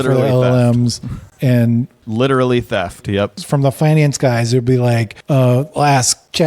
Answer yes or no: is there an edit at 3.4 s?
yes